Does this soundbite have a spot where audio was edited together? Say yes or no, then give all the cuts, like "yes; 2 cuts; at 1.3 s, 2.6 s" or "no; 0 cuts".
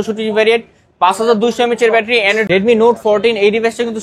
yes; 1 cut; at 2.4 s